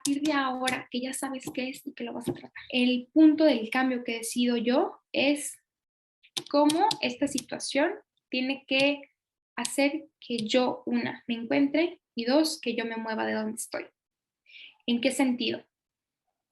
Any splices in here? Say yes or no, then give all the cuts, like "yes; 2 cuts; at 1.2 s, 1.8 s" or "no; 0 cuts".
yes; 1 cut; at 2.5 s